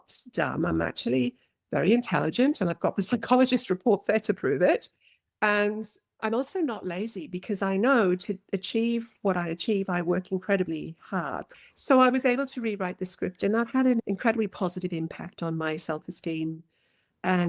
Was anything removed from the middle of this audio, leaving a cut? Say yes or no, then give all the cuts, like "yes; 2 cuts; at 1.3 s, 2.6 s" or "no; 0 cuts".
yes; 1 cut; at 11.4 s